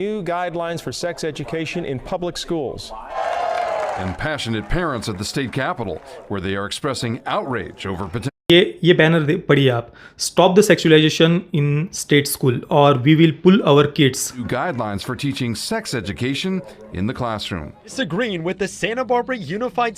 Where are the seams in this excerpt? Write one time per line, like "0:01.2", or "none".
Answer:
0:03.1
0:14.4
0:17.9